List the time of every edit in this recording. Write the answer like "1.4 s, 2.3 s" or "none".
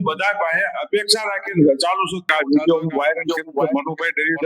2.2 s